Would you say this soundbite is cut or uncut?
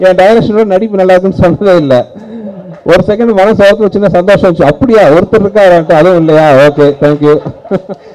uncut